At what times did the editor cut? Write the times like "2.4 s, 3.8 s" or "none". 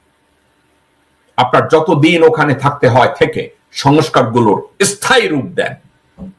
none